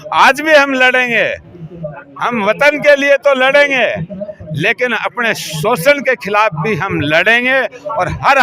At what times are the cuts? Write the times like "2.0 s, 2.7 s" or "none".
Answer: none